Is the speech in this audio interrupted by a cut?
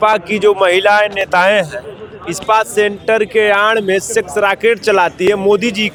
no; 0 cuts

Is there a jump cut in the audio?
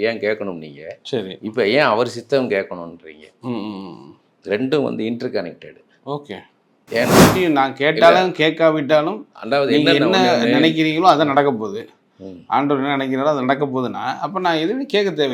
yes; 1 cut; at 7.3 s

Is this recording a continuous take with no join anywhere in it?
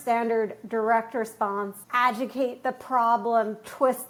yes; 0 cuts

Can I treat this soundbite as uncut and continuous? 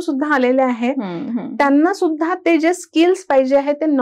yes; 0 cuts

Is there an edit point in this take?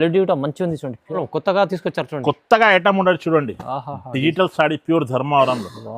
yes; 1 cut; at 1.2 s

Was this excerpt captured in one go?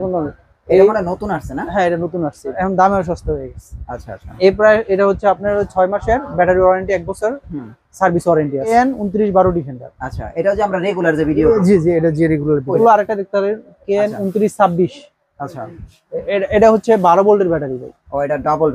no; 3 cuts; at 2.6 s, 8.7 s, 12.8 s

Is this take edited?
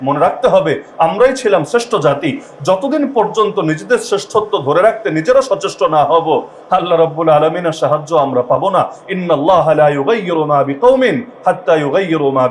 no; 0 cuts

